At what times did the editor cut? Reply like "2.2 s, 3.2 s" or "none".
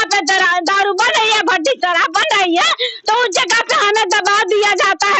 none